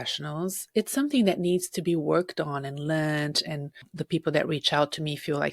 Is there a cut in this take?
yes; 1 cut; at 3.8 s

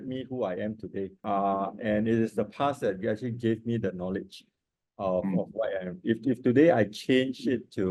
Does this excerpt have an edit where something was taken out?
yes; 1 cut; at 1.2 s

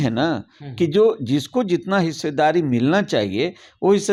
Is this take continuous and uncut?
yes; 0 cuts

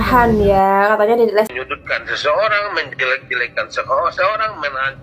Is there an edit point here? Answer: yes; 1 cut; at 1.5 s

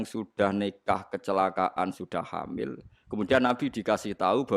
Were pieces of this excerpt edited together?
no; 0 cuts

